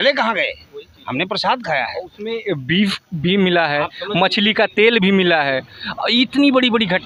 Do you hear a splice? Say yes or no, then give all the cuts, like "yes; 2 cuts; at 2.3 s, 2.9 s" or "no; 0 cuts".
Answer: no; 0 cuts